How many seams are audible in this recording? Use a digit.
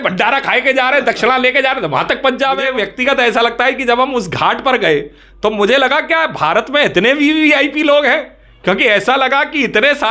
1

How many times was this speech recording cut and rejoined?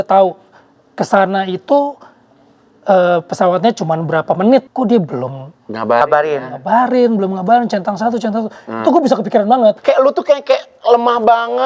2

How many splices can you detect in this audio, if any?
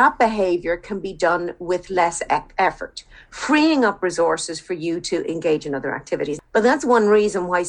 1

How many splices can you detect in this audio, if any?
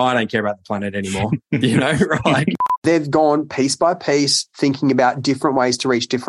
1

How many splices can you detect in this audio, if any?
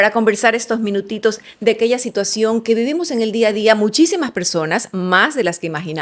0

